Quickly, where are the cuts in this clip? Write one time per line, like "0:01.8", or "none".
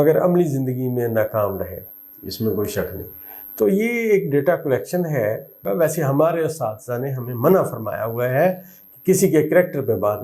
0:05.6